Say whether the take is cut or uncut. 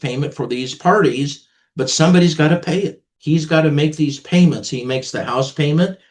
cut